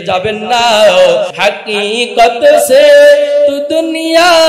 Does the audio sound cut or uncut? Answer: cut